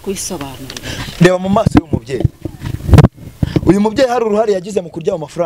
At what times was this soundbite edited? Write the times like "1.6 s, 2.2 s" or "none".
none